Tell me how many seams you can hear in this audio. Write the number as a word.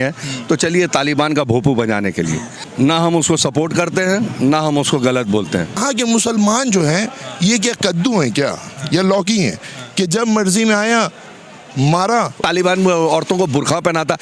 three